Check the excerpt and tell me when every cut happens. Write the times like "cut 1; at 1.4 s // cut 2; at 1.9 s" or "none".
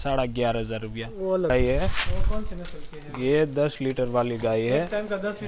cut 1; at 1.5 s